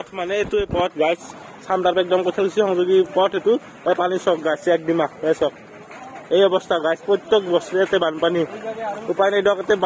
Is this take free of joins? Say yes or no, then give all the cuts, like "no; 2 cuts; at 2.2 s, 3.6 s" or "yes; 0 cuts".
yes; 0 cuts